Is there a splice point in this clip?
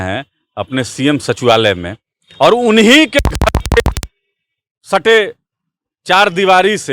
no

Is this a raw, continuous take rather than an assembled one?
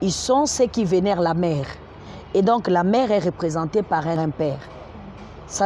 no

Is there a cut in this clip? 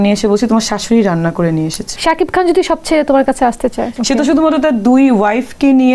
yes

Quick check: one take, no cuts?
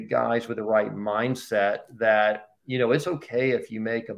yes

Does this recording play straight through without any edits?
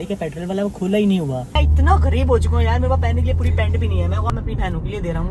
no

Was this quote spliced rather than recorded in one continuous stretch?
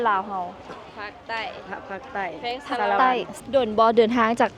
yes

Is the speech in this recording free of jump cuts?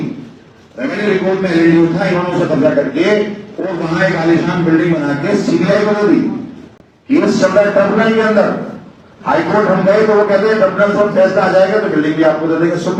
yes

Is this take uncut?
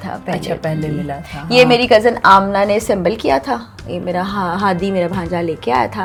yes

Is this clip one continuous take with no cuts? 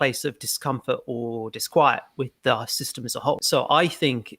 no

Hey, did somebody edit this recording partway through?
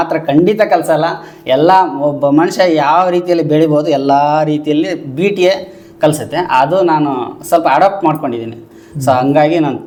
no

